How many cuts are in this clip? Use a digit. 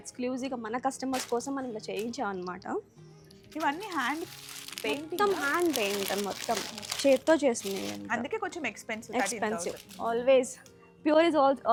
0